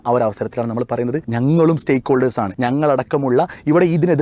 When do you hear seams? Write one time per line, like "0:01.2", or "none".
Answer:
0:01.3
0:02.5

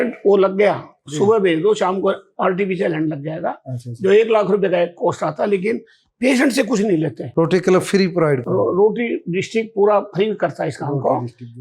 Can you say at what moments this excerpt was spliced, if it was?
none

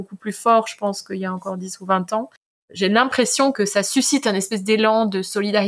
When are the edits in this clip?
0:02.7
0:03.5

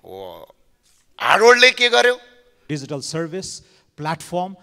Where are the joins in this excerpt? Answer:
0:02.6

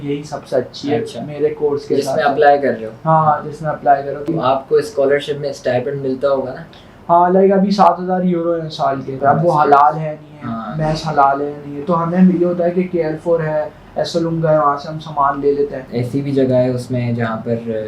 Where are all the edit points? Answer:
0:04.3
0:09.2
0:15.8

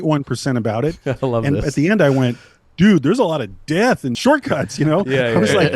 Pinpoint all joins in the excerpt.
0:04.2

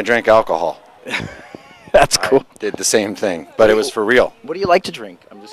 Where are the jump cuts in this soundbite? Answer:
0:03.4

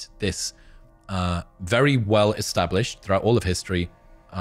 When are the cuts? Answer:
none

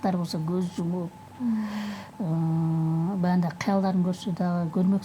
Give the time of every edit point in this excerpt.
none

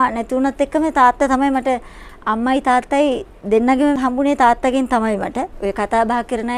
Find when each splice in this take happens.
0:04.0
0:05.5

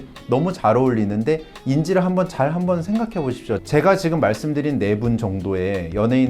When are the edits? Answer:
0:03.6

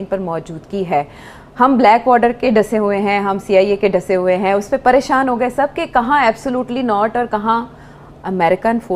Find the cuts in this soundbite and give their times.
none

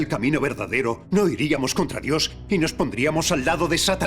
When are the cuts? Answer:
0:01.0

